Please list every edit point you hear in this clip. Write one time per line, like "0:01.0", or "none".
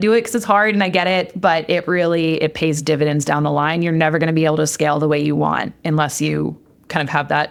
none